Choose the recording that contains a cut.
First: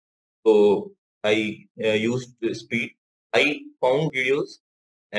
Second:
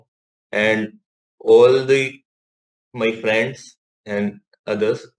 first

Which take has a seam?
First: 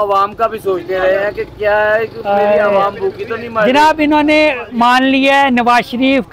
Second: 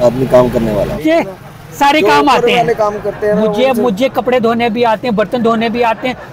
second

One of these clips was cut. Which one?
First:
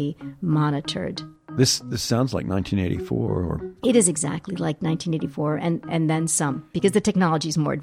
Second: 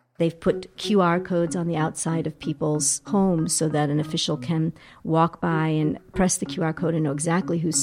first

